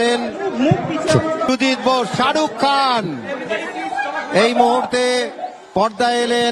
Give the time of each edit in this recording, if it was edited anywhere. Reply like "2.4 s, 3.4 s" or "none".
1.5 s